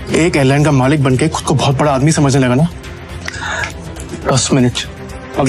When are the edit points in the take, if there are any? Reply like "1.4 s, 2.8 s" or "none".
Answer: none